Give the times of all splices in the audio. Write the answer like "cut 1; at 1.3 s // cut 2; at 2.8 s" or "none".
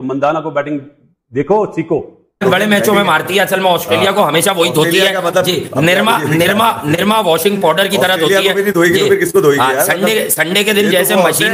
cut 1; at 2.3 s